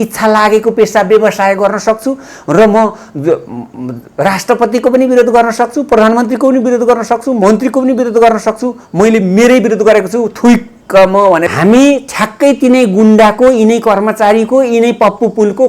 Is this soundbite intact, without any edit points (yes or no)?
no